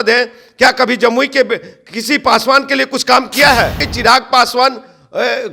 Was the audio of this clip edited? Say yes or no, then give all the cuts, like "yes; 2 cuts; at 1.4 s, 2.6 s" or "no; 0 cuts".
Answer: yes; 1 cut; at 3.9 s